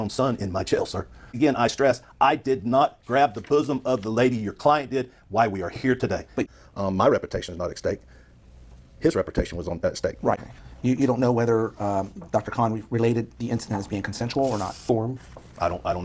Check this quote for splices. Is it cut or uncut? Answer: cut